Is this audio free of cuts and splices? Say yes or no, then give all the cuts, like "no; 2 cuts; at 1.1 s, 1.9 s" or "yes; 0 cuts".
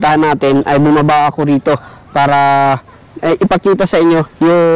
yes; 0 cuts